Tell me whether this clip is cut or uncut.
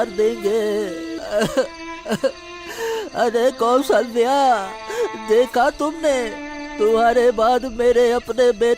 cut